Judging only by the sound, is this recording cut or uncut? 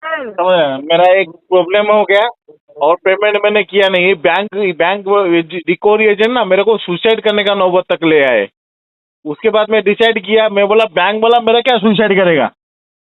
uncut